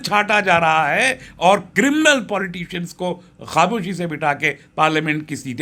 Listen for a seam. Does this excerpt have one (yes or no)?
no